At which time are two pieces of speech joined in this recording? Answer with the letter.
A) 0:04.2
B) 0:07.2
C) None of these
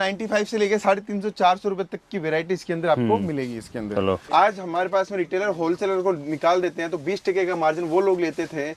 A